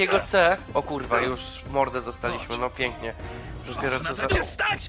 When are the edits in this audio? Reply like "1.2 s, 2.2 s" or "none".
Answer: none